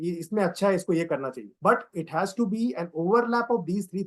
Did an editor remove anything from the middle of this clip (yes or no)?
yes